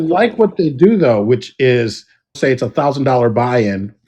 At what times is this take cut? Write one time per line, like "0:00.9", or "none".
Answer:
0:02.4